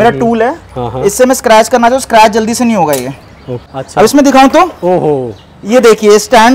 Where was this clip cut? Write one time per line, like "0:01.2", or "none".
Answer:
0:03.8